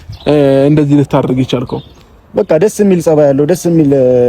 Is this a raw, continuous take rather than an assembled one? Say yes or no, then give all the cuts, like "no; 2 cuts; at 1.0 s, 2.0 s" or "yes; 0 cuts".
no; 1 cut; at 1.9 s